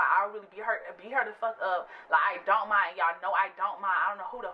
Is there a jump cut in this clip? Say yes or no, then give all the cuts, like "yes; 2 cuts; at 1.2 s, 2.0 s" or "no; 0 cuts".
no; 0 cuts